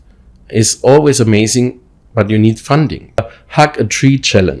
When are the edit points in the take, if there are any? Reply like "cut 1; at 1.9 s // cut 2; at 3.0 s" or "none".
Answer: cut 1; at 3.3 s